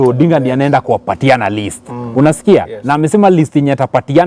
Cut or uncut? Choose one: uncut